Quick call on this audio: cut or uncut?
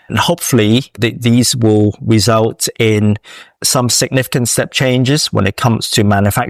uncut